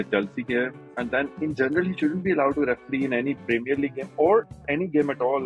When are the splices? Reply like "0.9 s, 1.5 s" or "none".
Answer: none